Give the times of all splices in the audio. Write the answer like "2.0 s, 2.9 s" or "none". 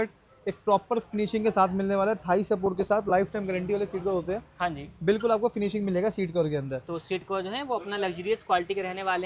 none

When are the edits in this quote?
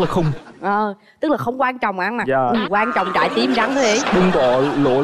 none

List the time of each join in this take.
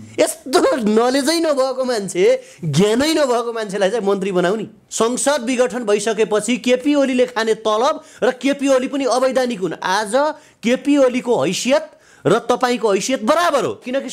4.8 s

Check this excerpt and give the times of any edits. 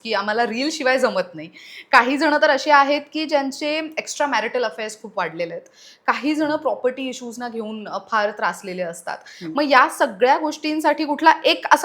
none

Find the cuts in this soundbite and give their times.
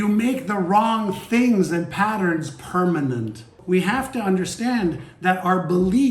3.6 s

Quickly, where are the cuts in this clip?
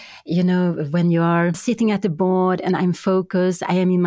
1.6 s

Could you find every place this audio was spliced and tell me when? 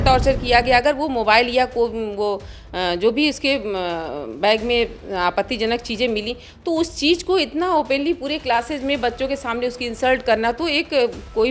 none

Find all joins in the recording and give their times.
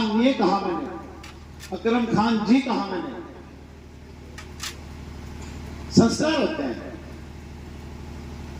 none

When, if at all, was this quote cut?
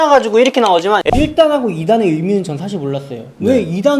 1.0 s

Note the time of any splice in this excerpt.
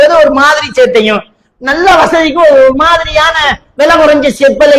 none

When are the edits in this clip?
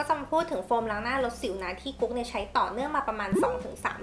none

